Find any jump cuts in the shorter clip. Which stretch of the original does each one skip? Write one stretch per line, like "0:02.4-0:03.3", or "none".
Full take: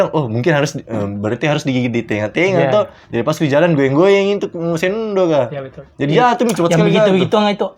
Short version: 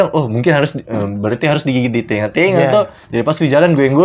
none